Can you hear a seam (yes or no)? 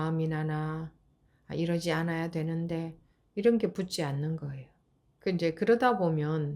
yes